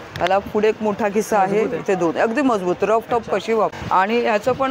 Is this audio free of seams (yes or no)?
no